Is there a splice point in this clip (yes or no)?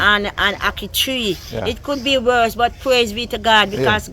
no